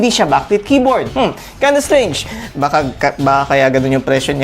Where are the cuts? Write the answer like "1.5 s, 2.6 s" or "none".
2.4 s